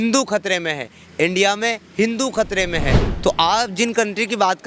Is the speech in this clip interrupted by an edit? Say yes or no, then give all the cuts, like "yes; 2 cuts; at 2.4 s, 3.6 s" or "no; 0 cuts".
yes; 1 cut; at 3.0 s